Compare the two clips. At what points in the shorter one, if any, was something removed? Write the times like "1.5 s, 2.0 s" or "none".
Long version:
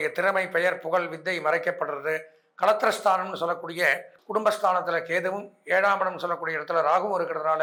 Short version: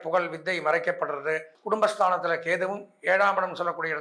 1.5 s